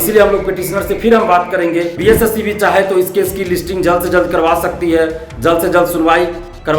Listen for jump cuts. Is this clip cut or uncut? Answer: cut